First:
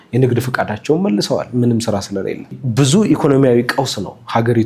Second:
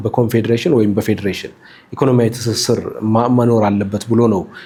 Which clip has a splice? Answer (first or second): first